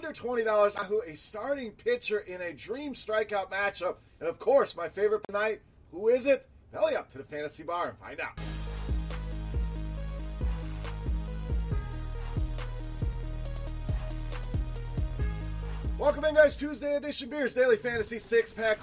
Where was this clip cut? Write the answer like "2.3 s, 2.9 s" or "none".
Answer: 0.8 s, 5.3 s